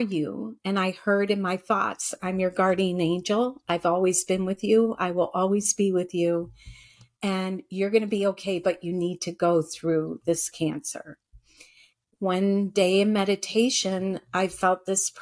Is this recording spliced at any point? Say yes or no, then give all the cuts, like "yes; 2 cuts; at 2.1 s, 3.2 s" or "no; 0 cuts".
yes; 1 cut; at 11.8 s